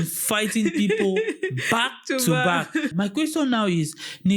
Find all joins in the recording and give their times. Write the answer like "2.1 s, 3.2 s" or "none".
2.9 s